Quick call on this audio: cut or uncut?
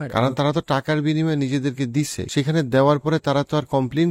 cut